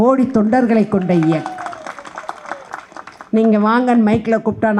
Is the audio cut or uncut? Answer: uncut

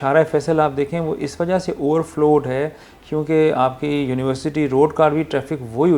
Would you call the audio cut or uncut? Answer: uncut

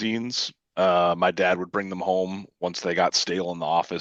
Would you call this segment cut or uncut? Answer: uncut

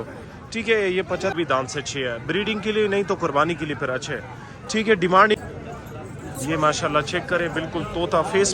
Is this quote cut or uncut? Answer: cut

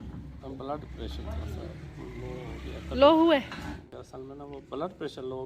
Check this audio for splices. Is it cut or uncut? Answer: cut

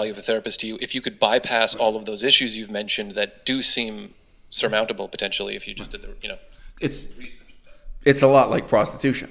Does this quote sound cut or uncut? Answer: uncut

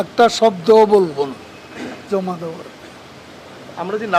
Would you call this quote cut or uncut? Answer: uncut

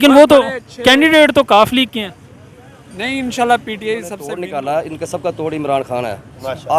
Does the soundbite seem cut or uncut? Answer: cut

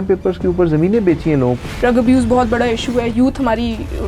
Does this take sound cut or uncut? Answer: cut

